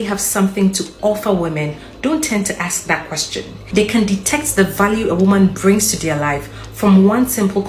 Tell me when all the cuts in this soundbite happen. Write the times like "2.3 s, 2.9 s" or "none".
3.6 s